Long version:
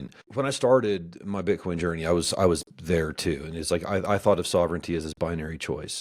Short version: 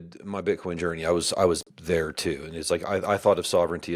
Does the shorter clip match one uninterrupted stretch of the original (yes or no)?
yes